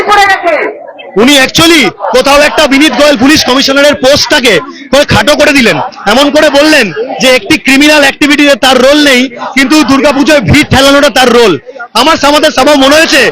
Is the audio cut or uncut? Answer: cut